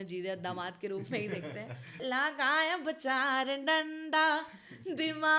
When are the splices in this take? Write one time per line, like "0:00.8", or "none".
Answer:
0:02.0

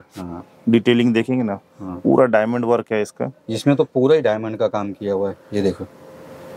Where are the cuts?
none

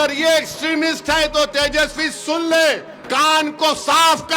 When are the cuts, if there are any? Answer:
0:02.9

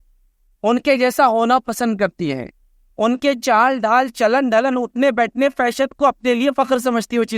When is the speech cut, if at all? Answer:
none

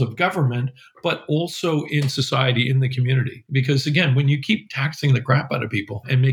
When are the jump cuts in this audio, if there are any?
none

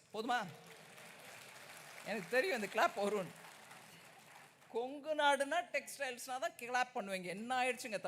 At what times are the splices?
none

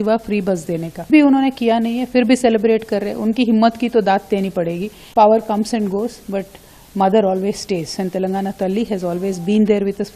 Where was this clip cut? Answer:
0:01.0
0:04.9

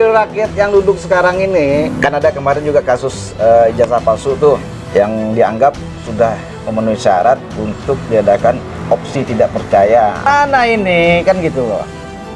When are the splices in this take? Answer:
0:01.9
0:04.7
0:10.3

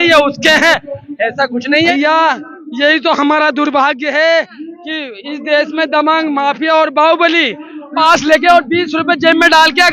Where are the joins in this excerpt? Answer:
0:01.9
0:08.0

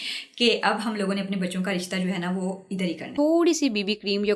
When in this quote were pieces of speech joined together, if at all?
0:03.1

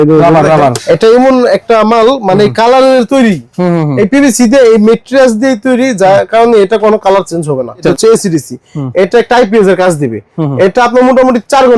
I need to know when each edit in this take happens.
0:00.8
0:07.9

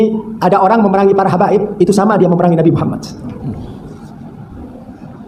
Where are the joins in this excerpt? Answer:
none

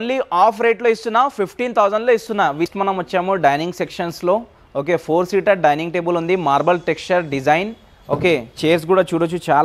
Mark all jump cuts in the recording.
0:02.7

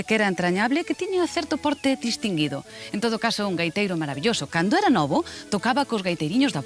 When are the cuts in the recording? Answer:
0:01.3

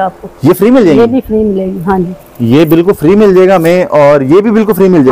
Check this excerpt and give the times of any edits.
none

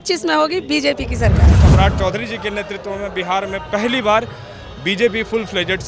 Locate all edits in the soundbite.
0:01.6

